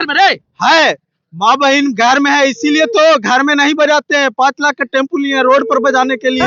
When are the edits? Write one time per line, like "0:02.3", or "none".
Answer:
none